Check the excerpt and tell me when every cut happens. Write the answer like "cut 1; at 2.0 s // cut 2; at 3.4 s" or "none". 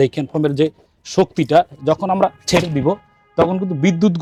none